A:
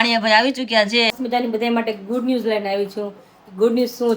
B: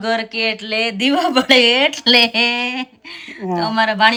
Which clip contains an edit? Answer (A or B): A